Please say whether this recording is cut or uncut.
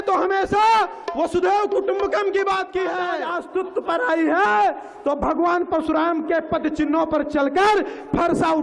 cut